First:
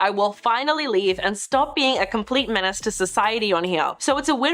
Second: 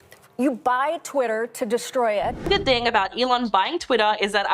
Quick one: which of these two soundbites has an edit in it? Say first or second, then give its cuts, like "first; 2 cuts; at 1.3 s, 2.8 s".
second; 1 cut; at 2.4 s